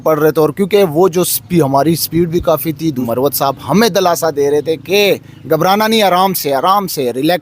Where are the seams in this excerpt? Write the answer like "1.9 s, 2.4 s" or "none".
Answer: 3.1 s